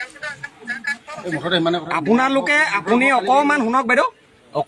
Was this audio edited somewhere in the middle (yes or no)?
no